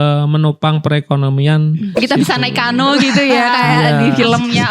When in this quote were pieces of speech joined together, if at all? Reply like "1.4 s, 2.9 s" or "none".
2.0 s